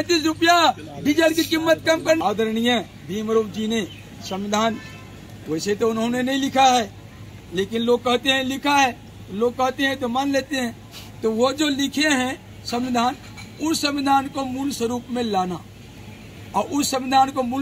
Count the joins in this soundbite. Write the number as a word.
one